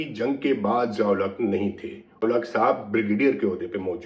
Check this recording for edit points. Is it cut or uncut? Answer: cut